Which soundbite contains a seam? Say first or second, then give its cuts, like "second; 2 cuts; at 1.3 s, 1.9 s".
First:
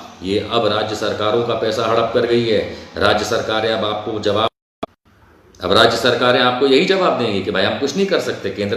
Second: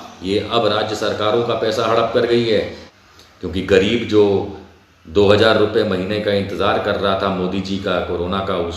second; 1 cut; at 2.8 s